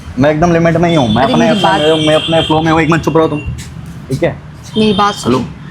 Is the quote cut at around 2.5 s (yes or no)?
no